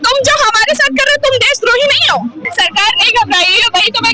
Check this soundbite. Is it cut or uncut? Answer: cut